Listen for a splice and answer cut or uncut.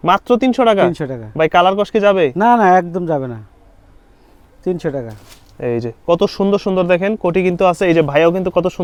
uncut